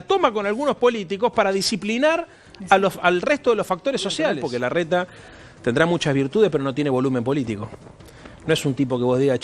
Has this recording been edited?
yes; 1 cut; at 4.4 s

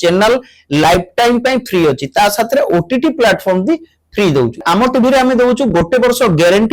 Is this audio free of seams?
no; 1 cut; at 4.6 s

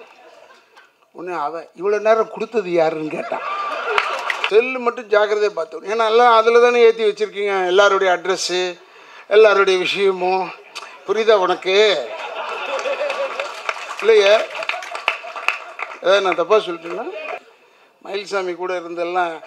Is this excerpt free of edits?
no; 2 cuts; at 4.4 s, 17.4 s

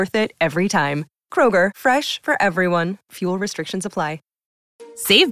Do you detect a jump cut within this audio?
yes; 1 cut; at 4.3 s

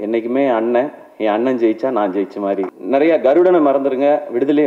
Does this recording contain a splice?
yes; 1 cut; at 2.8 s

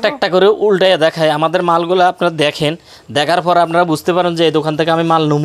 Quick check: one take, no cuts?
yes; 0 cuts

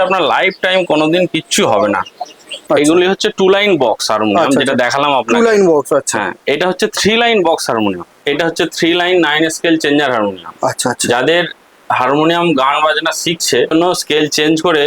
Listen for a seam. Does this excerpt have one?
yes; 3 cuts; at 2.5 s, 8.1 s, 13.7 s

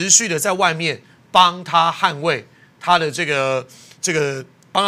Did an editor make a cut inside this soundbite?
no; 0 cuts

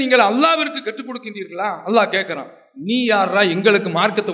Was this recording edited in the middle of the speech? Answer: no; 0 cuts

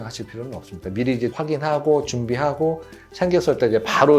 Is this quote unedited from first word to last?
no; 1 cut; at 1.3 s

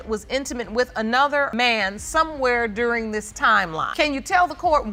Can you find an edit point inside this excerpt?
no; 0 cuts

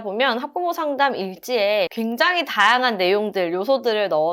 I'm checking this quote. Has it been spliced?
yes; 1 cut; at 1.9 s

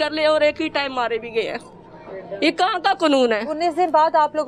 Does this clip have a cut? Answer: no; 0 cuts

